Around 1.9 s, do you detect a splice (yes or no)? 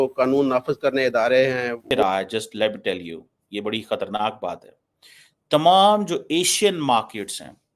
yes